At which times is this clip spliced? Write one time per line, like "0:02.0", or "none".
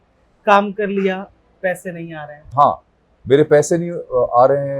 0:02.5

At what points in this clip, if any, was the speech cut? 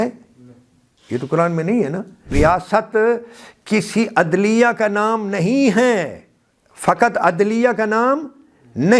0:02.3

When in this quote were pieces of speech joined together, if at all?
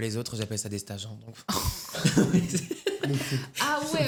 none

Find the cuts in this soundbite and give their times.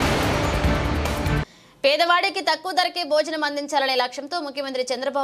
0:01.2

